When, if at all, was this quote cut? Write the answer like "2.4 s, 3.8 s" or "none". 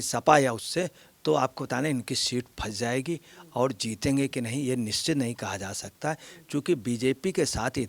none